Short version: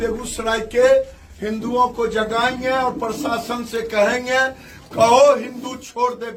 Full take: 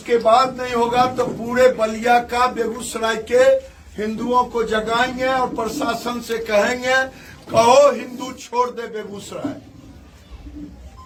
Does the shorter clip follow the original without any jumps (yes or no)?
yes